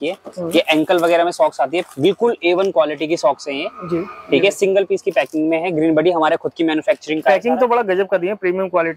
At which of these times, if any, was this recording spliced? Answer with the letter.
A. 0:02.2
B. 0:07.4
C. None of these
C